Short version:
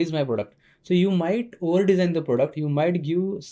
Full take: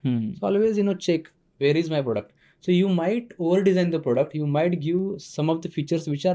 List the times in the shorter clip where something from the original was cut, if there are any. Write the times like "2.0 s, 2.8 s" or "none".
none